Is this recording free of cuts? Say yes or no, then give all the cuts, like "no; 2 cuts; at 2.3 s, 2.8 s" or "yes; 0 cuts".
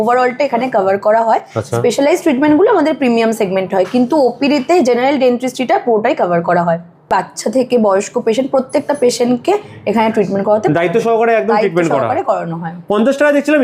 yes; 0 cuts